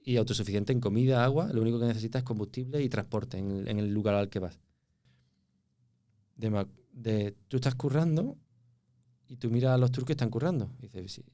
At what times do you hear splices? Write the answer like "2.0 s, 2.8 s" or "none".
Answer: 5.1 s